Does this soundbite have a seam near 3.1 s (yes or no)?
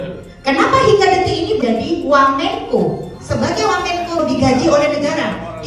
yes